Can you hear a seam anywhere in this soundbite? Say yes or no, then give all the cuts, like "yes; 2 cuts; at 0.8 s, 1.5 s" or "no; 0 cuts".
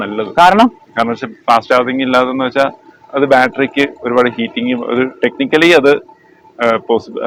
no; 0 cuts